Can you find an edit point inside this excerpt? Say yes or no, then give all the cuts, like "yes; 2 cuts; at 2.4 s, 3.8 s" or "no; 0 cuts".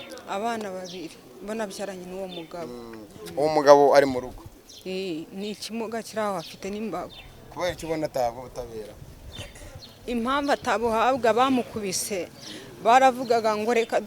no; 0 cuts